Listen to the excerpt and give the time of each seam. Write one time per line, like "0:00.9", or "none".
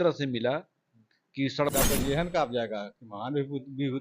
0:01.7